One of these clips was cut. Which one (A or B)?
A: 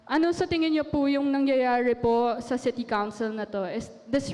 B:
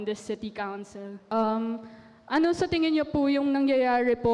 B